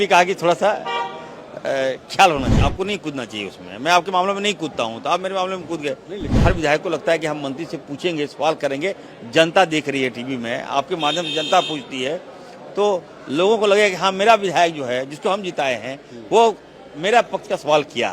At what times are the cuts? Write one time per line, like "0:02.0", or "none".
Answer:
0:02.5
0:06.3